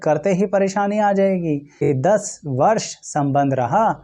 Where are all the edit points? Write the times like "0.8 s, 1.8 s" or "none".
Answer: 1.8 s